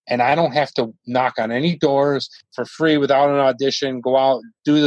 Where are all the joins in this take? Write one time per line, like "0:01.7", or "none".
none

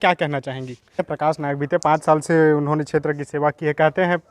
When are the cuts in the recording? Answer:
0:01.0

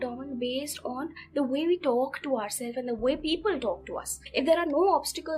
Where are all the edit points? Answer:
0:04.1

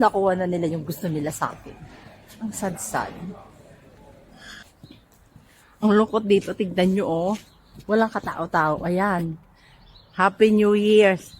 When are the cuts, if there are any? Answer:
0:04.6

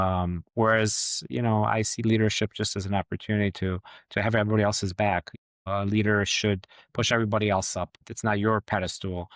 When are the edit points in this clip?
0:06.7

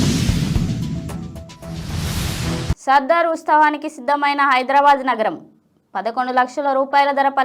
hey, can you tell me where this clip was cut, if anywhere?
0:02.6

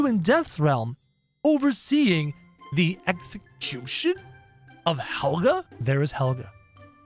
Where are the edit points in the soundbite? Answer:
0:05.7

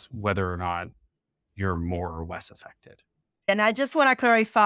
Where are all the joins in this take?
0:03.5

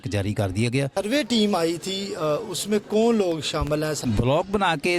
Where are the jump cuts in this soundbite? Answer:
0:00.9
0:04.0

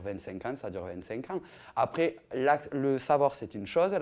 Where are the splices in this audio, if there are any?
none

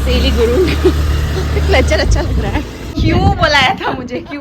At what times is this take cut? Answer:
0:02.8

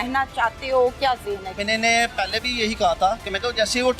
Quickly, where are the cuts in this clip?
0:01.5

